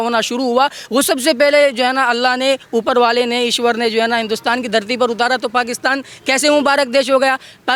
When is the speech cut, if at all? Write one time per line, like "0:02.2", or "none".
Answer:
none